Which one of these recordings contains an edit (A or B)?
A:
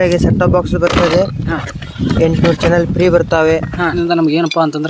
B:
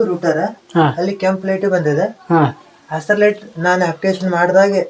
A